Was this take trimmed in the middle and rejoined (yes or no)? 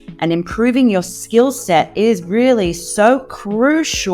no